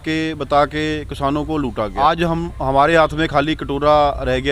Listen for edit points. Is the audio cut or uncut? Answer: cut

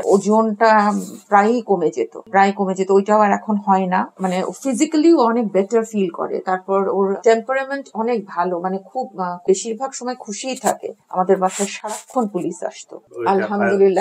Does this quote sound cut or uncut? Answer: cut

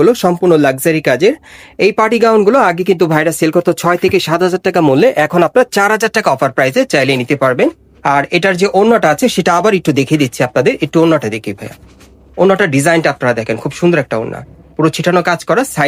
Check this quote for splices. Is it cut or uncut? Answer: uncut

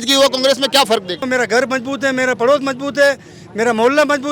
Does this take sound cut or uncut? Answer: cut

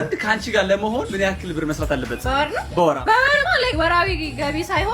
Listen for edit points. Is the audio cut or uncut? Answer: uncut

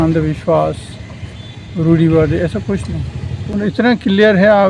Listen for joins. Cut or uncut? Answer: cut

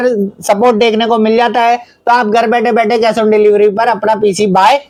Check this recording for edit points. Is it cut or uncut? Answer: uncut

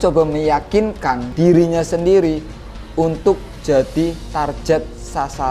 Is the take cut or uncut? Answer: cut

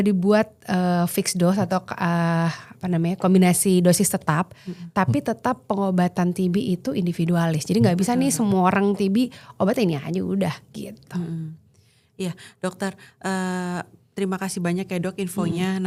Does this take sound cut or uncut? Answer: uncut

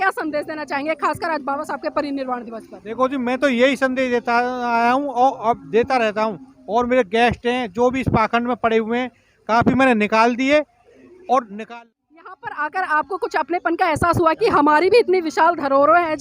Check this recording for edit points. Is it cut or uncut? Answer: cut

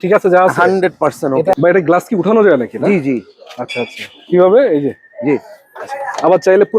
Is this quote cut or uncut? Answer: cut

